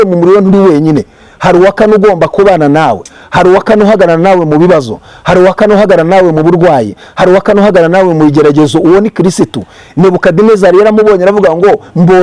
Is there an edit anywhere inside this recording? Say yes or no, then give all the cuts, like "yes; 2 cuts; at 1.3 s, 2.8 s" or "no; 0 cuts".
no; 0 cuts